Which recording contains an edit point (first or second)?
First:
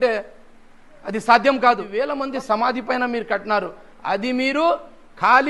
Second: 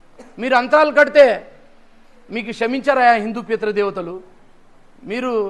first